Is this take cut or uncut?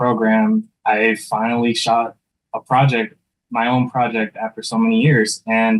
uncut